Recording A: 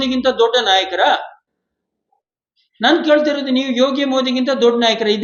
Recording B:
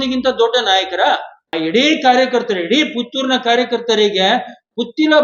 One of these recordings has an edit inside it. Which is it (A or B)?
B